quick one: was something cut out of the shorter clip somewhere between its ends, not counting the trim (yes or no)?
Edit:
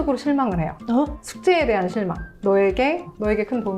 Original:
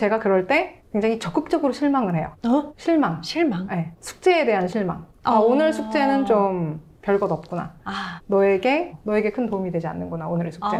yes